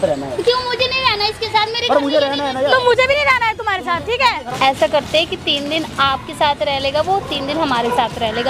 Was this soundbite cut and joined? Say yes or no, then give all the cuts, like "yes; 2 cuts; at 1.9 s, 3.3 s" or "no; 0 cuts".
yes; 1 cut; at 4.4 s